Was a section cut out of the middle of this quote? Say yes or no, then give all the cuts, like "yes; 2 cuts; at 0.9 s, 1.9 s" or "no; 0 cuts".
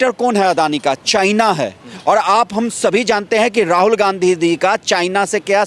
no; 0 cuts